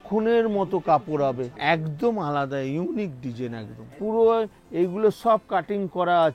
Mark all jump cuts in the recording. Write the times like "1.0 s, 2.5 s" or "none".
1.5 s, 3.8 s